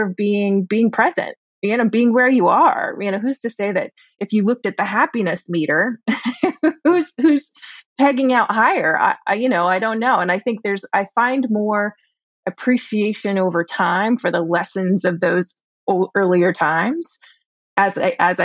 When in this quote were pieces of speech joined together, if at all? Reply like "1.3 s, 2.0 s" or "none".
none